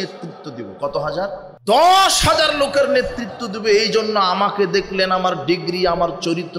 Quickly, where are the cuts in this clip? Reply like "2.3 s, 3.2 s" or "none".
1.5 s